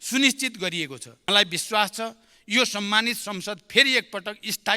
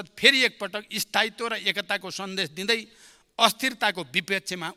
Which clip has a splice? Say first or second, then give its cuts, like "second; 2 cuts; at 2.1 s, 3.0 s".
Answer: first; 1 cut; at 1.1 s